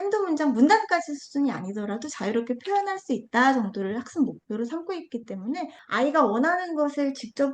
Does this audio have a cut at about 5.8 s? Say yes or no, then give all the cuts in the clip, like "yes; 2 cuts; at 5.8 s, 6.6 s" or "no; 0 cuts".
yes; 1 cut; at 5.8 s